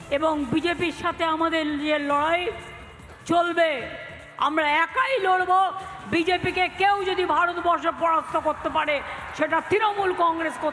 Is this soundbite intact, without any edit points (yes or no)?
yes